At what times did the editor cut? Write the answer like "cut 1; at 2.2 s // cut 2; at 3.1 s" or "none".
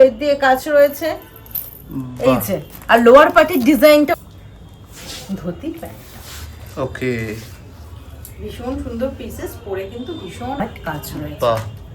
cut 1; at 4.1 s // cut 2; at 10.6 s